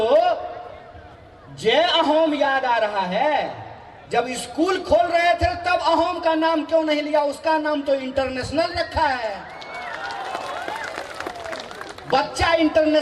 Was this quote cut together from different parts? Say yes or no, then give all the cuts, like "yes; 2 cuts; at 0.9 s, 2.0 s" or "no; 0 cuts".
no; 0 cuts